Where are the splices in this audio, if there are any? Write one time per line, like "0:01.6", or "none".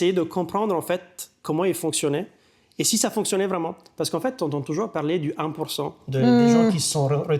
none